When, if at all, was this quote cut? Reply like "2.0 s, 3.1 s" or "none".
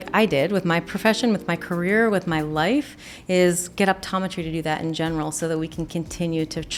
none

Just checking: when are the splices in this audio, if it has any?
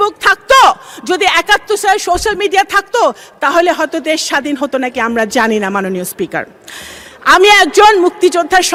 none

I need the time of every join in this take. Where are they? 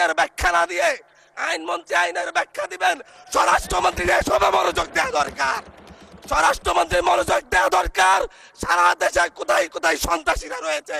none

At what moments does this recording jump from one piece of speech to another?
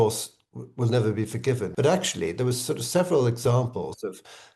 1.7 s

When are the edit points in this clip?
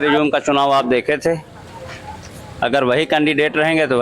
none

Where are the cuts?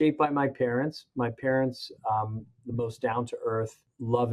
none

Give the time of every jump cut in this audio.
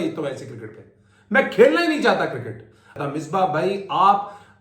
2.9 s

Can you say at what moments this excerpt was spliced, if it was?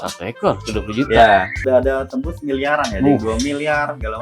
1.6 s

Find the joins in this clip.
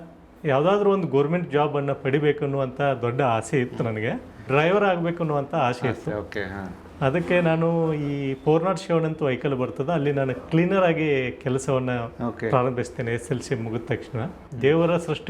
4.5 s, 14.4 s

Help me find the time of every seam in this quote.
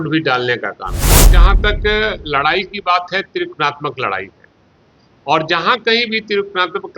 1.3 s

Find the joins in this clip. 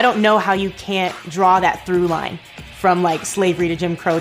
1.2 s

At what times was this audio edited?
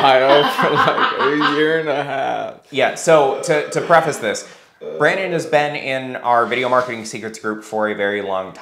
none

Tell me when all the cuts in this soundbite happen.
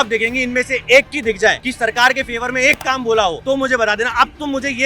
1.7 s, 3.4 s

